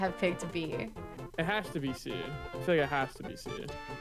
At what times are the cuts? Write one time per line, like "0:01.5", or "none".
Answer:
0:01.0

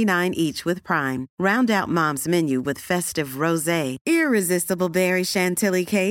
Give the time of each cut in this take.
none

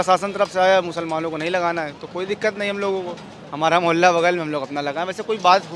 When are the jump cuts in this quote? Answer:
none

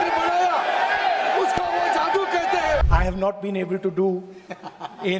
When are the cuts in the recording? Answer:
0:02.9

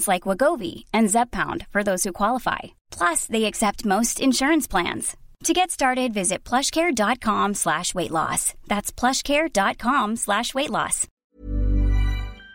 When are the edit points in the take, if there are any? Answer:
0:11.1

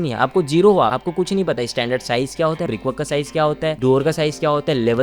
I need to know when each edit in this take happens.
0:01.0
0:02.7

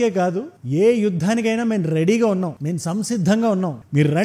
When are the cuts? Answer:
none

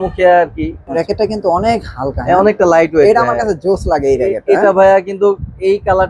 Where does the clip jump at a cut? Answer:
0:01.0

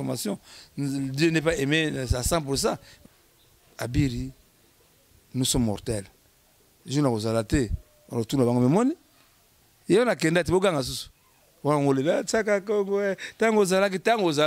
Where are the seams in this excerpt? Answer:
0:02.9

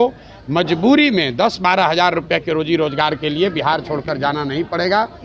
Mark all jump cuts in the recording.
none

